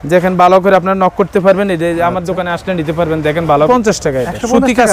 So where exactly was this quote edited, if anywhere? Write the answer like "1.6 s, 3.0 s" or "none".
3.7 s